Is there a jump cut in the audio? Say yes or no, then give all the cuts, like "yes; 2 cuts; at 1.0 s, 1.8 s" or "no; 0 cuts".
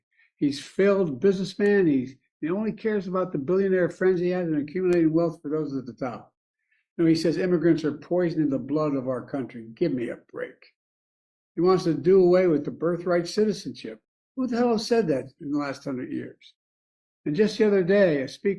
no; 0 cuts